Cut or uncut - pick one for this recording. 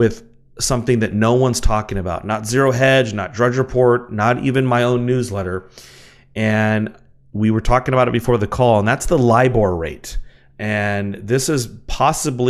cut